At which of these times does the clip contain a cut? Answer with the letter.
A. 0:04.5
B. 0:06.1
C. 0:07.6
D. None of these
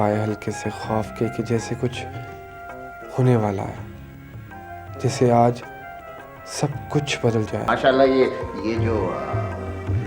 C